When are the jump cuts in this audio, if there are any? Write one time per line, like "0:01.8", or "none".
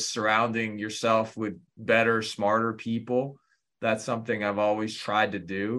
0:01.7

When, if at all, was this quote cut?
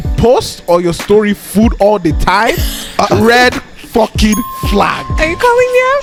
none

